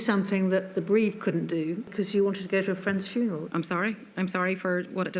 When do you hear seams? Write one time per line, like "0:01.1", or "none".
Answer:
0:01.9
0:03.4